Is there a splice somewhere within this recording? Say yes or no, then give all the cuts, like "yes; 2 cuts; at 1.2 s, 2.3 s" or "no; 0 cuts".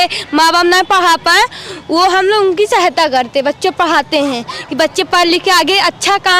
no; 0 cuts